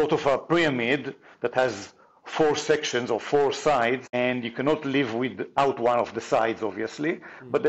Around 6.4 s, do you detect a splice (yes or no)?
no